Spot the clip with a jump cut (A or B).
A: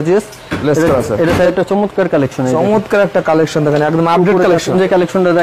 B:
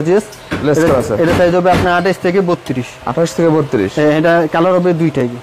A